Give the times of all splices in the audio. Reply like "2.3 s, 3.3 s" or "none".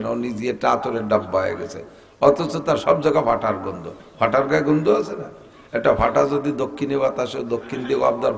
none